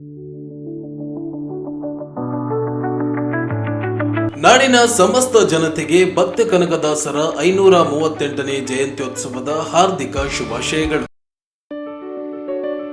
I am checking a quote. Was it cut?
yes; 1 cut; at 11.1 s

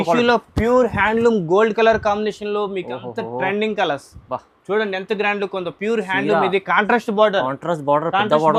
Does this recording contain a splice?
no; 0 cuts

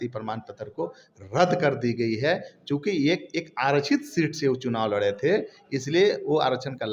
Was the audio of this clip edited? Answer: no; 0 cuts

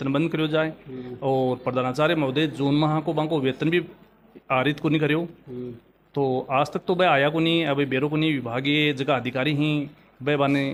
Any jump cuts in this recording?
no; 0 cuts

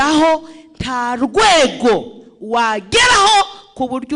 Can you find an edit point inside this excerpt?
no; 0 cuts

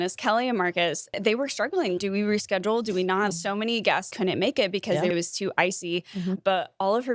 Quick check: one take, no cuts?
no; 2 cuts; at 1.1 s, 5.1 s

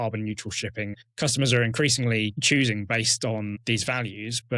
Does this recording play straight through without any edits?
no; 3 cuts; at 1.0 s, 2.4 s, 3.6 s

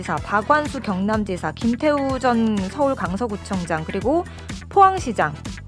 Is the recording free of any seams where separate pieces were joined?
yes; 0 cuts

